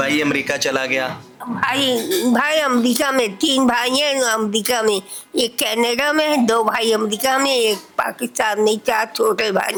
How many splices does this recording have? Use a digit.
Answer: 0